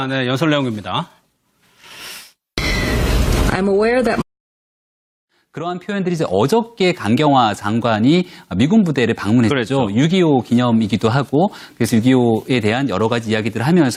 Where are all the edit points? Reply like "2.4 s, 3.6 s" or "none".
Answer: none